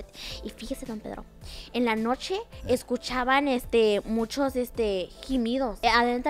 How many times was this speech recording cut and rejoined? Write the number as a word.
zero